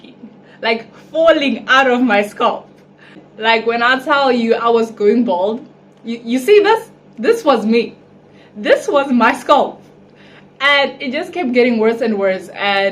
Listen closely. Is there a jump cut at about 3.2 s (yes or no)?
yes